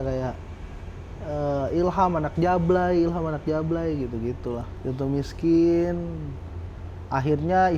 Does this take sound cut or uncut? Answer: cut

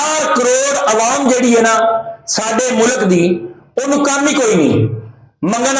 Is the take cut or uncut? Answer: uncut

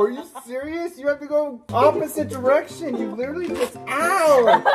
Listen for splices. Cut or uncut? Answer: cut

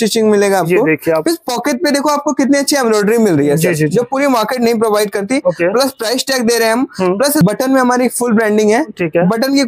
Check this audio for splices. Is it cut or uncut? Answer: cut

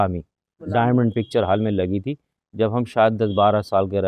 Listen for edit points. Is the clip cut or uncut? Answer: uncut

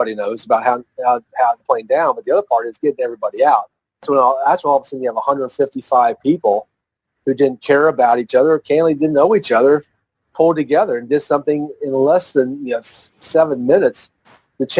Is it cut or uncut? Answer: cut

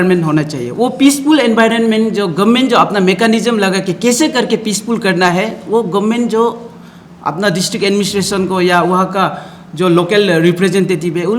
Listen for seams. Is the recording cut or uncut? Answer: uncut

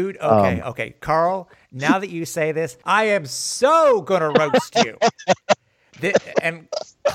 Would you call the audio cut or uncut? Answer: cut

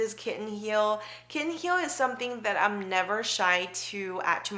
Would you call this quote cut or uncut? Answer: uncut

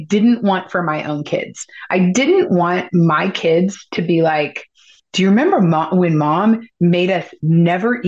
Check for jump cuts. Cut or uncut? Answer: uncut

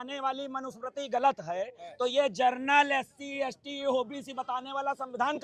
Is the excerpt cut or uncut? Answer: uncut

